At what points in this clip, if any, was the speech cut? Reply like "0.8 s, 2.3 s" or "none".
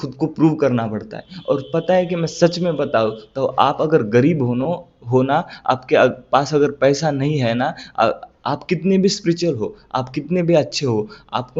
none